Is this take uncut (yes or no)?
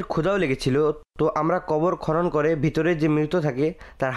no